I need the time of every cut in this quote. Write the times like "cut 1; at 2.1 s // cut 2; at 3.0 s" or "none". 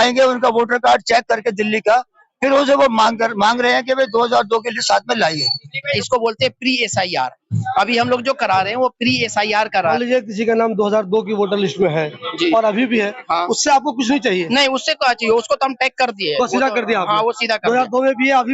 cut 1; at 5.9 s // cut 2; at 9.9 s